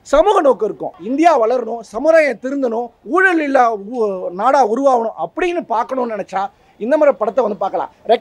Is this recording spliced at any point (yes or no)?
yes